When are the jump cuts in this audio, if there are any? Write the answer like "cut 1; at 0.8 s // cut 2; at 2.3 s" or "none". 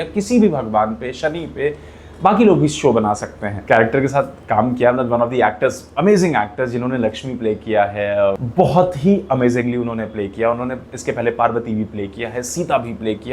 cut 1; at 3.5 s // cut 2; at 8.4 s